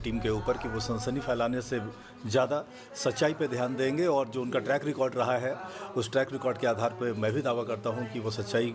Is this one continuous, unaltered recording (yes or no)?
yes